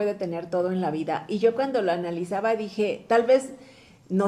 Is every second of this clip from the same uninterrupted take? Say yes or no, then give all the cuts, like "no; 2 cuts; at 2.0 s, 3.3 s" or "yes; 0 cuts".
yes; 0 cuts